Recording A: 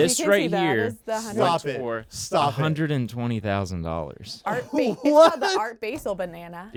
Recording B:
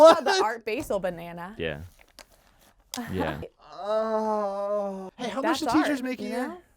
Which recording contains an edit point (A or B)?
B